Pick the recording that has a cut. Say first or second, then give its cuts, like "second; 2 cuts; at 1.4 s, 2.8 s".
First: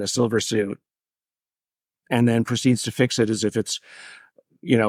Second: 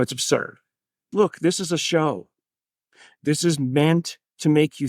second; 1 cut; at 1.1 s